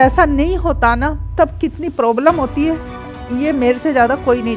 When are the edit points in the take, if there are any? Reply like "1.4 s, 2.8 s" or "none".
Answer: none